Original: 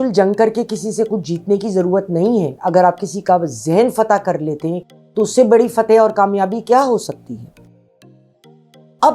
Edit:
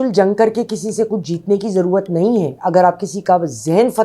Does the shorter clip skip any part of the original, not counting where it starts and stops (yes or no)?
no